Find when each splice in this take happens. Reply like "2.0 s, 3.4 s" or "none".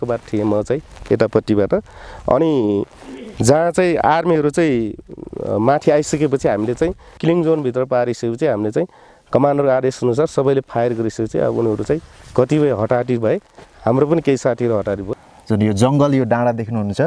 7.1 s, 15.2 s